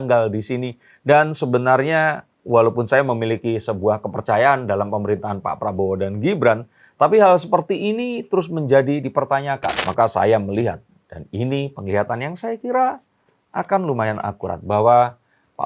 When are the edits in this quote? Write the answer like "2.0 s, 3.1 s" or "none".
9.8 s